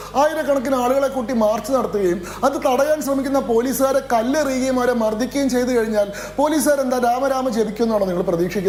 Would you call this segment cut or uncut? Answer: uncut